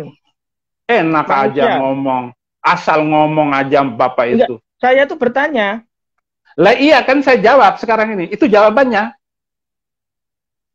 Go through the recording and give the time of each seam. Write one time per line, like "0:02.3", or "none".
none